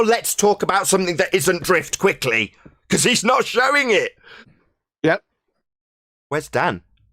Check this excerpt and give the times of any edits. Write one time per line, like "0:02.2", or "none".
0:04.5